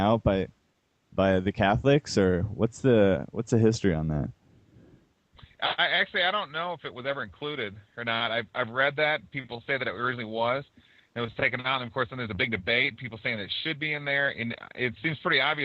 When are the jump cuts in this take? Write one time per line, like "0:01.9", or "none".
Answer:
0:02.4